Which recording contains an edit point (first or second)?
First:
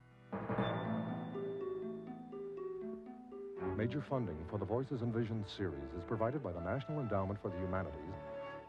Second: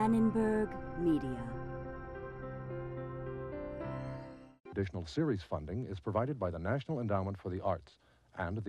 second